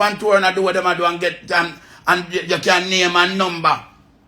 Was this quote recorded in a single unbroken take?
yes; 0 cuts

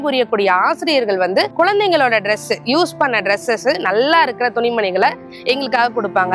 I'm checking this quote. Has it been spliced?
yes; 1 cut; at 1.5 s

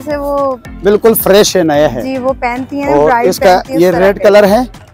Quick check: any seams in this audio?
no; 0 cuts

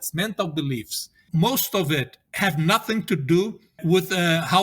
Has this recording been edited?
yes; 3 cuts; at 1.2 s, 2.2 s, 3.8 s

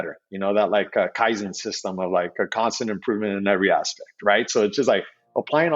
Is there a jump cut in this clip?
no; 0 cuts

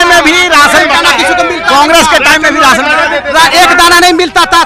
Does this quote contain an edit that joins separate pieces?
no; 0 cuts

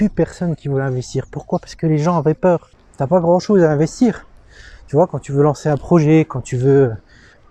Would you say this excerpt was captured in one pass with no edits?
no; 1 cut; at 2.7 s

